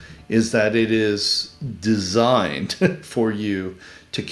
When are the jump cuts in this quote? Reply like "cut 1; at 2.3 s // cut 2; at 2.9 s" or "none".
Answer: none